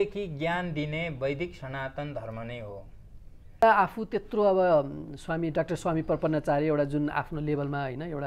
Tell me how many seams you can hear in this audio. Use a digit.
1